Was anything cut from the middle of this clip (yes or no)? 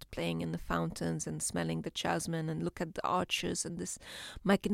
no